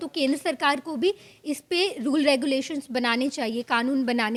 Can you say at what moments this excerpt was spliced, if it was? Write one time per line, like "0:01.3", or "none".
none